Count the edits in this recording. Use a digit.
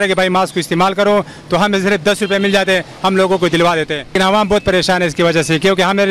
1